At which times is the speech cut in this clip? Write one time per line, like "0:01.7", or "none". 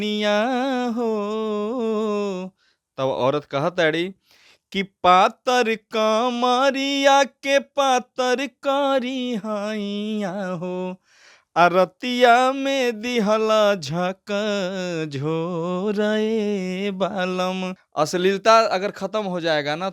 0:17.8